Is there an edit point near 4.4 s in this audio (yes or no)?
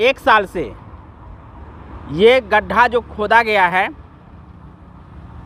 no